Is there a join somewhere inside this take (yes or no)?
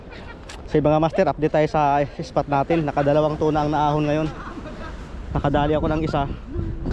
no